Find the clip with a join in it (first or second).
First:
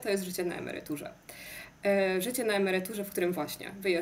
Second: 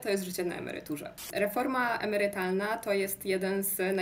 second